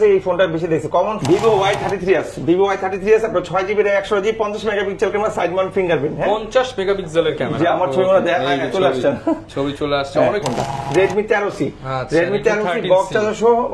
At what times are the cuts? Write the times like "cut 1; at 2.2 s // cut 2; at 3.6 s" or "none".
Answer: cut 1; at 1.2 s // cut 2; at 10.5 s